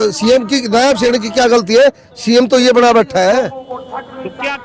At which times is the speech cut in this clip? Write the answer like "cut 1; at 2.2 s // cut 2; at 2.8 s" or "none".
none